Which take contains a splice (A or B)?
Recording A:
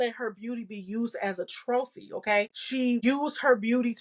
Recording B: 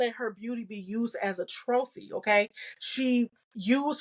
A